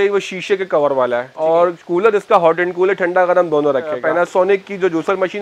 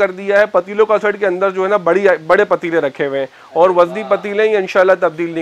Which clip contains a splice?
first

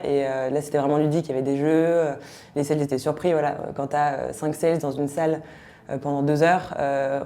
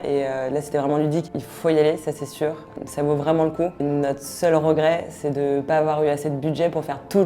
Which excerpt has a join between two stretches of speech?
second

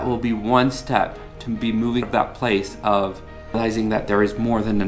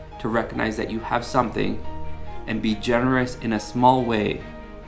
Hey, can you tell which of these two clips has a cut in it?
first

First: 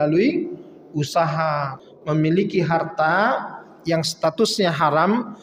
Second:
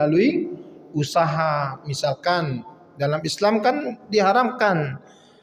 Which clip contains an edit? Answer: first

